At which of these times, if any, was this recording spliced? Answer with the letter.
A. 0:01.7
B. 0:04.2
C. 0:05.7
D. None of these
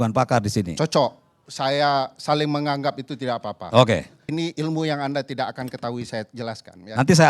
B